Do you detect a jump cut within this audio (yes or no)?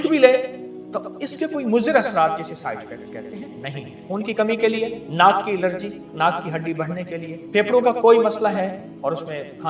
yes